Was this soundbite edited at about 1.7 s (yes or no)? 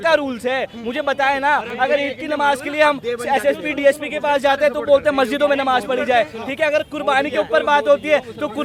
no